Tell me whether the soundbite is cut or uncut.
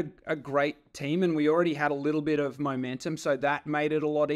uncut